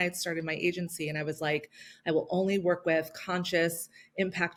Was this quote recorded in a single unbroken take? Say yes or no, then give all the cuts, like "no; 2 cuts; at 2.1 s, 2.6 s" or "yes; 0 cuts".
yes; 0 cuts